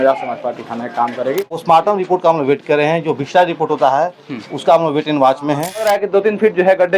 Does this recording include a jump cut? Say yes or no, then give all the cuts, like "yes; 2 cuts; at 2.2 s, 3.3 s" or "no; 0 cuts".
yes; 2 cuts; at 1.6 s, 5.8 s